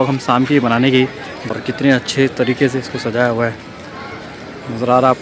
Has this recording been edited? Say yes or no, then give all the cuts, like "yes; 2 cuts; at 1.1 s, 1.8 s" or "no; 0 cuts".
yes; 1 cut; at 1.5 s